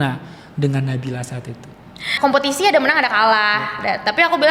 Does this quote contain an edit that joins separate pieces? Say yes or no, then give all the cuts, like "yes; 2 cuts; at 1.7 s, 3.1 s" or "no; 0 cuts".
yes; 1 cut; at 2.0 s